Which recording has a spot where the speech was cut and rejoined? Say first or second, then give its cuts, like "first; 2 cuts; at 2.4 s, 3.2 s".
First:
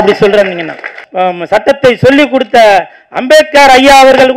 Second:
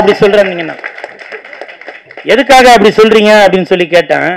first; 1 cut; at 1.0 s